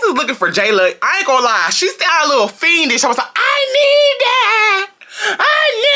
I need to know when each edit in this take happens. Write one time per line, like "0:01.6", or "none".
none